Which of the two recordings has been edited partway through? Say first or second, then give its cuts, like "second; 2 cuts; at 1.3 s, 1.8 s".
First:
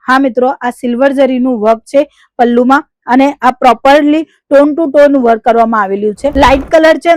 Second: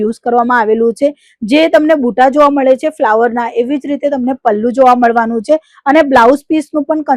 first; 1 cut; at 6.2 s